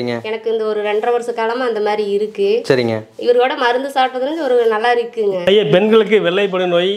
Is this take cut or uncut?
cut